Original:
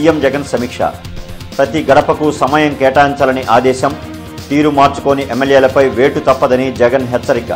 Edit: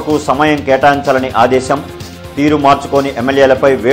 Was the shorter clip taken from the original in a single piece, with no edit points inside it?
yes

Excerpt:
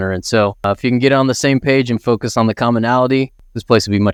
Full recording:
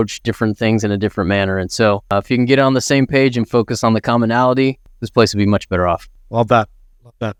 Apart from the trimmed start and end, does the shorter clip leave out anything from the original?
no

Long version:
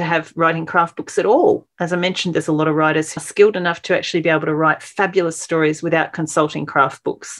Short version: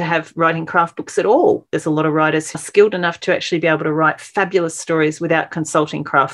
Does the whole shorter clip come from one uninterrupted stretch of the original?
no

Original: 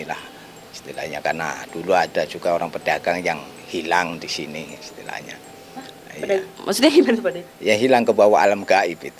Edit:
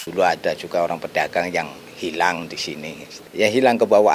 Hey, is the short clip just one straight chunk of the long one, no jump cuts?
no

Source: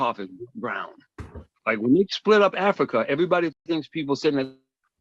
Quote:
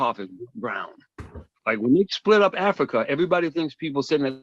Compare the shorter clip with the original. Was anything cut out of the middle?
yes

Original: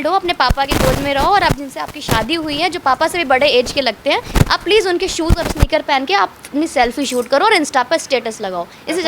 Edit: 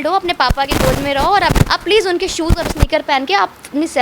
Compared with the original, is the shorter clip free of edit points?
no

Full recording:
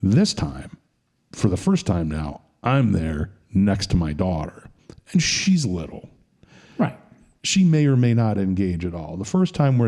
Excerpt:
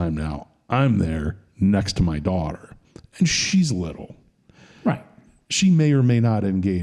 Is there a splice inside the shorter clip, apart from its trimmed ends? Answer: no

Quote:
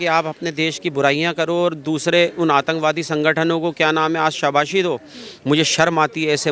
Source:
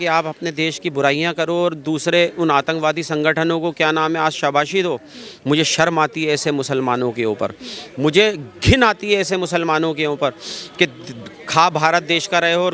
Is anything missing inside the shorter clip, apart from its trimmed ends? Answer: no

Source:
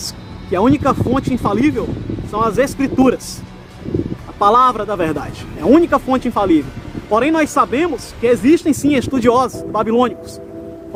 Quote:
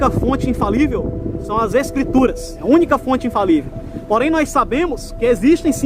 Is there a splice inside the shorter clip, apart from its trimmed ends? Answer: yes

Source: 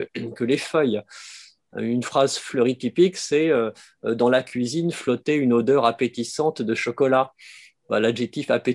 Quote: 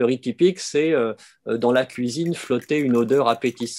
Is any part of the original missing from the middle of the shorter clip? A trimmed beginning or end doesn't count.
no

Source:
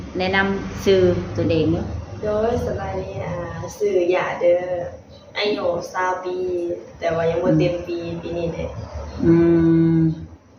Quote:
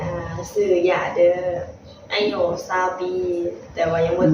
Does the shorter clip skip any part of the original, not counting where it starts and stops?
no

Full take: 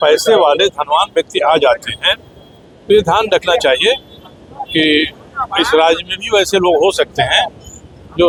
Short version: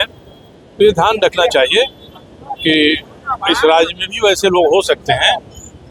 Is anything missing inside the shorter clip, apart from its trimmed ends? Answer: no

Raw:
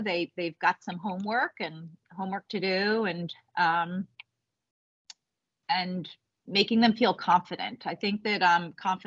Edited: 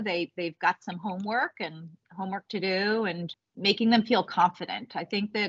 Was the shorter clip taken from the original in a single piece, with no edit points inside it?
no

